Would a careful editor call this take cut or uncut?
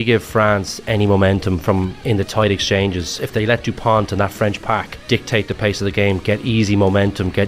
cut